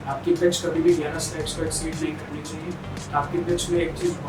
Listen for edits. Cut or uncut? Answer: uncut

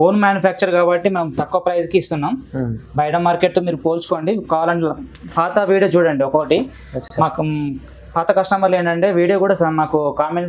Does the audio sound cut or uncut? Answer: uncut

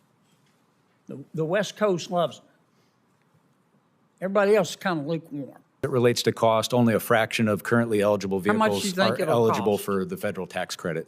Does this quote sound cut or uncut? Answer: cut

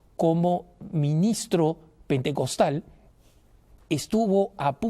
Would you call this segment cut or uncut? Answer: uncut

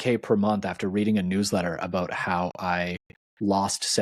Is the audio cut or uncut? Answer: uncut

